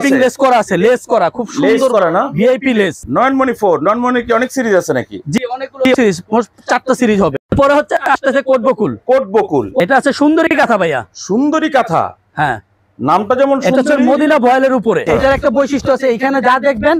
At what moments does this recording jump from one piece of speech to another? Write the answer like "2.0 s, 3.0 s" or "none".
3.0 s, 7.3 s, 9.8 s, 15.0 s